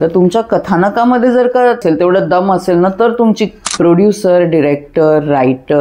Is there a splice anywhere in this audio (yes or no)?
yes